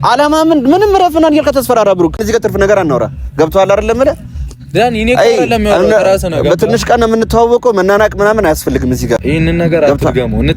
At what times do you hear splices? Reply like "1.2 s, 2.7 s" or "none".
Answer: 2.2 s, 9.2 s